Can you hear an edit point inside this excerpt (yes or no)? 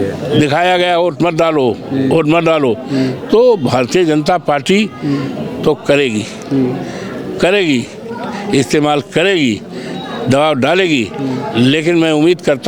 no